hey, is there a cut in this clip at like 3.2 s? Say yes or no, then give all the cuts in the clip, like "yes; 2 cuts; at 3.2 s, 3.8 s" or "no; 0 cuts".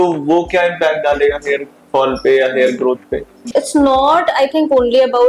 no; 0 cuts